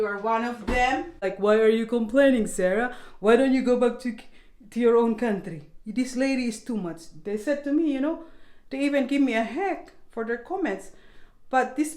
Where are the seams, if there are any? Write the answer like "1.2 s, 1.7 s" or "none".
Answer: 1.3 s